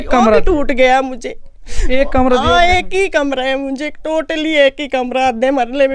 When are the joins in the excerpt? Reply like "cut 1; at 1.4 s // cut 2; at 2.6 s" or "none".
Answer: none